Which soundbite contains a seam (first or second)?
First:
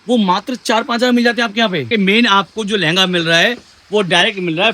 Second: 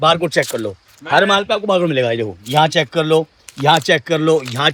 first